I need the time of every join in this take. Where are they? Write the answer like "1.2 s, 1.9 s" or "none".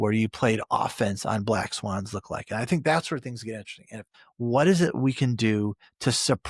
4.2 s

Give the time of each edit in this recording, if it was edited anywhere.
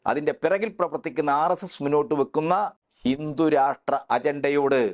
2.8 s

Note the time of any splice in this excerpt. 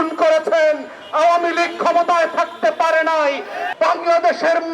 3.6 s

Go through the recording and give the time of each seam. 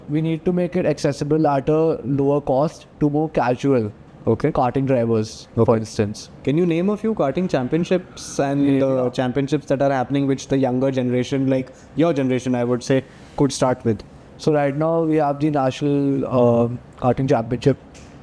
none

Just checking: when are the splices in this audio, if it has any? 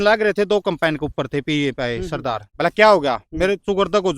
2.4 s

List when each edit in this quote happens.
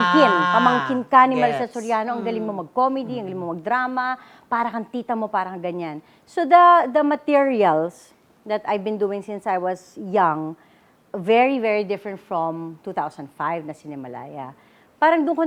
none

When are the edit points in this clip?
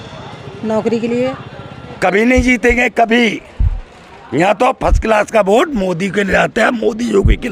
1.9 s

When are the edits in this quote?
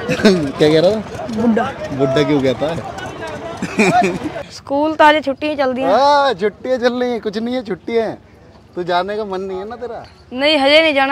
4.5 s

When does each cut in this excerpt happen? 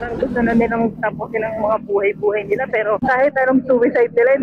none

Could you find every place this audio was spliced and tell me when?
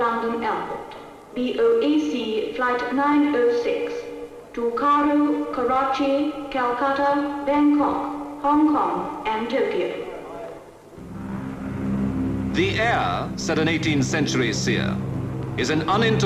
5.9 s

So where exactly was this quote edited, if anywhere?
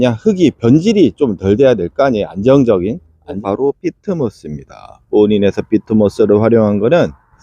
3.4 s

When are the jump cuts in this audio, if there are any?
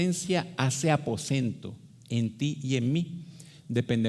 none

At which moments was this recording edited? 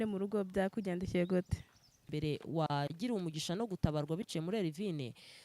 2.1 s

